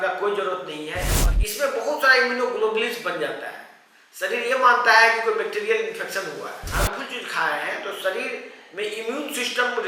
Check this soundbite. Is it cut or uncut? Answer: cut